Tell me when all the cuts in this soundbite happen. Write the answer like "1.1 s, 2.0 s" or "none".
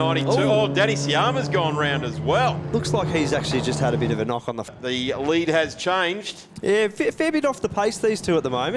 4.7 s